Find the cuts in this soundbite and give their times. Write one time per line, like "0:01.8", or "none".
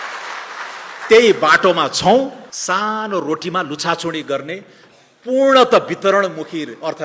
0:02.5